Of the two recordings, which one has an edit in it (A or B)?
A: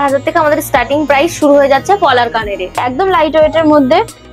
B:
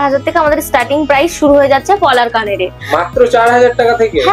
A